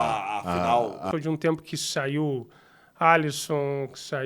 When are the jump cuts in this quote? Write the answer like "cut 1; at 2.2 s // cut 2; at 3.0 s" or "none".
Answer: cut 1; at 1.1 s